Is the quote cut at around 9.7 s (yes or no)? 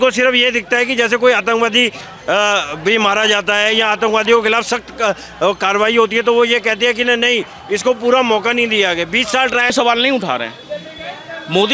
yes